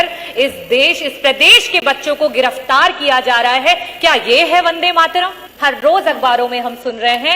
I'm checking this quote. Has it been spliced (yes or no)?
yes